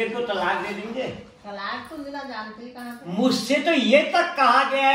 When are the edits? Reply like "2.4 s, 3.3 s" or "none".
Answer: none